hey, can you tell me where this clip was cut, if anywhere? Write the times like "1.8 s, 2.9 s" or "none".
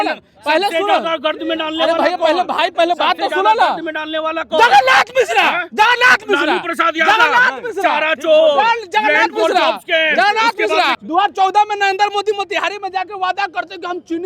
11.0 s